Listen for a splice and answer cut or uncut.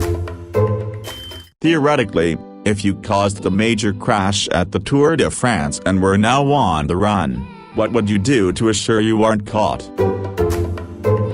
cut